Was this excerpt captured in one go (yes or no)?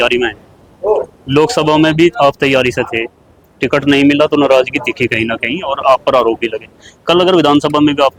yes